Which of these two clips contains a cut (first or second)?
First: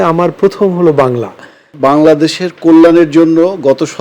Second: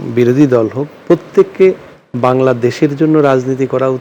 first